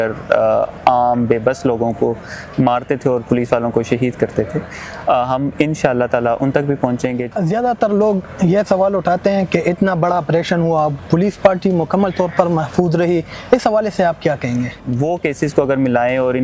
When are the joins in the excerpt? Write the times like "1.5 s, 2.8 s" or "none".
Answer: 7.2 s, 14.9 s